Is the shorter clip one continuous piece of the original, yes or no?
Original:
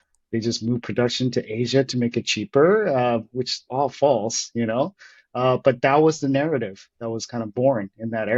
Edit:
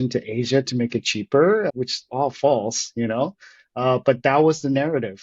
no